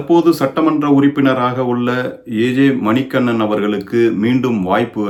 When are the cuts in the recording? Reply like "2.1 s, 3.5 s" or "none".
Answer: none